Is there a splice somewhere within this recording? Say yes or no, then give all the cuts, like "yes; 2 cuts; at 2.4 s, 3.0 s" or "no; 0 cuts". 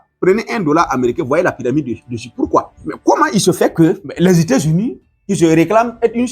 yes; 2 cuts; at 2.8 s, 4.1 s